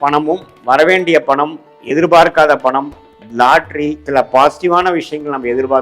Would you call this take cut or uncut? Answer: cut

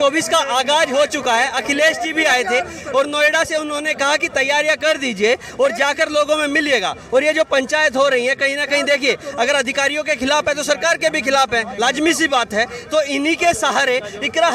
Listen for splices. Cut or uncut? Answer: uncut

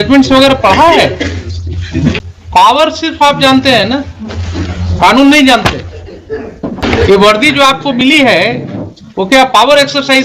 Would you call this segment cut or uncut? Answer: cut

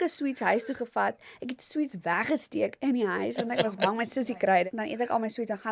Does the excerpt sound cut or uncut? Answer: cut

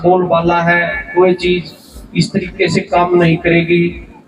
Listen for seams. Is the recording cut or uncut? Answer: uncut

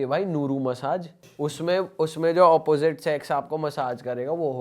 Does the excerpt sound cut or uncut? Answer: cut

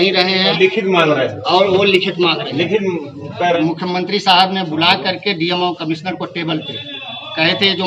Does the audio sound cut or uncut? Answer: cut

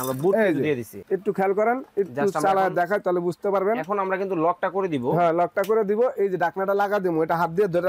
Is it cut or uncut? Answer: cut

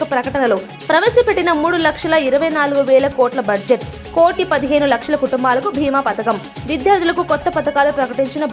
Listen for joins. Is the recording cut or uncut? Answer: uncut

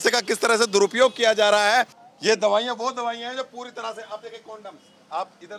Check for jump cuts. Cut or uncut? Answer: cut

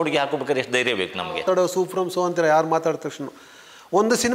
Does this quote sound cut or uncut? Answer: cut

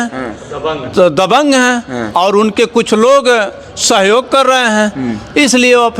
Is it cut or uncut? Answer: uncut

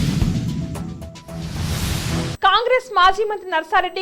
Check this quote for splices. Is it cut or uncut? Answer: cut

